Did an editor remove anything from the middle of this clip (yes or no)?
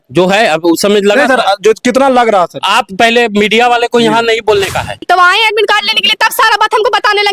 yes